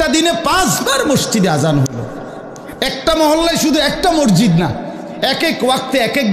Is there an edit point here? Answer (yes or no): no